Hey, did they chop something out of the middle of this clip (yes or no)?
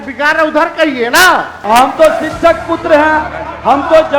yes